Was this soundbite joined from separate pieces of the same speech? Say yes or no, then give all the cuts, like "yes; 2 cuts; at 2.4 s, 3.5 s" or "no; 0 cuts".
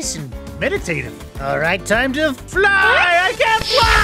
no; 0 cuts